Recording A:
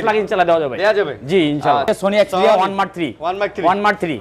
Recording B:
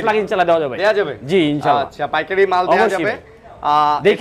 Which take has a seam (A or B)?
A